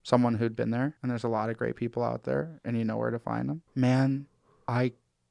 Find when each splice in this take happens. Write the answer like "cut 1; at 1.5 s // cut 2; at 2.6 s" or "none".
cut 1; at 1.0 s // cut 2; at 3.6 s